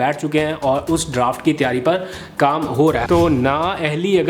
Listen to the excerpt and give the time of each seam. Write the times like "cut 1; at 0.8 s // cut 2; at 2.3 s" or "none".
cut 1; at 3.0 s